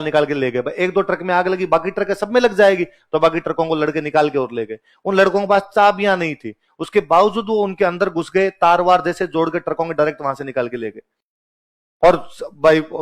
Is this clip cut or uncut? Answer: uncut